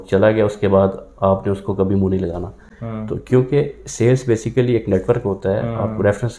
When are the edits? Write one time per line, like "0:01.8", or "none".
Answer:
none